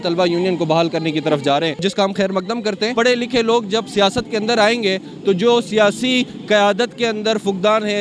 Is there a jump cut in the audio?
yes; 2 cuts; at 1.8 s, 2.9 s

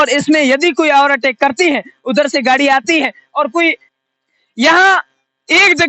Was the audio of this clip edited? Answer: yes; 1 cut; at 4.0 s

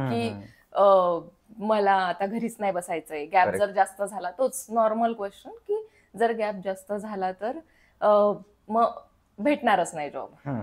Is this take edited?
no; 0 cuts

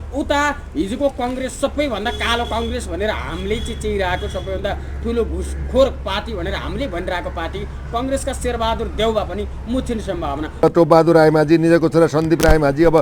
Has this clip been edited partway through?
yes; 1 cut; at 10.6 s

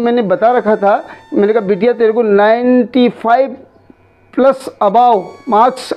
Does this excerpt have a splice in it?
no; 0 cuts

